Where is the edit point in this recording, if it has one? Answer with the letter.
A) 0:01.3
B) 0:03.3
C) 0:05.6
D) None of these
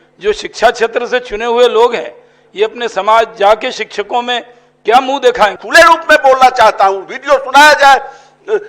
C